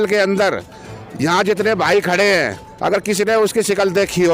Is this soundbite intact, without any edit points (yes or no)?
yes